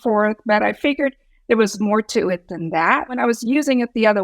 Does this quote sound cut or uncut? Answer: cut